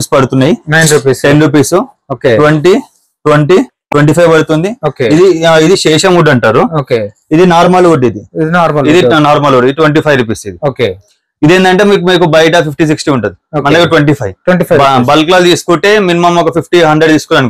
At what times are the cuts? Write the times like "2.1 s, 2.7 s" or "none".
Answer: none